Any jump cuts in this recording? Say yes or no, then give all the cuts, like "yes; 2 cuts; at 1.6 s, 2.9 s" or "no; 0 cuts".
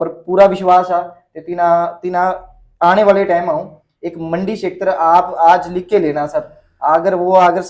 no; 0 cuts